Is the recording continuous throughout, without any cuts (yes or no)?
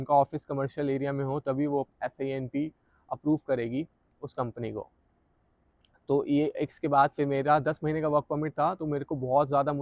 yes